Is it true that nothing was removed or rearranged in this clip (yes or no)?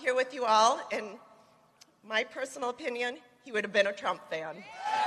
yes